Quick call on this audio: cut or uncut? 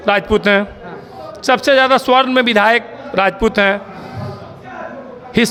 uncut